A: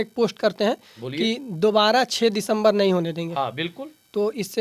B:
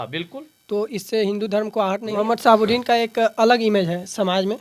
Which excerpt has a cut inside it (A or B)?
B